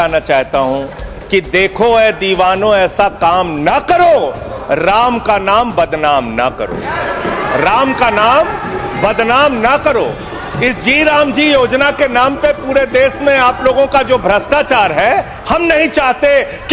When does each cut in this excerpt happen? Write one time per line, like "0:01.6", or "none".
none